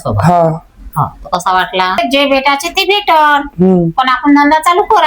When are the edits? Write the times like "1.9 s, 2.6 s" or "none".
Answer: 2.0 s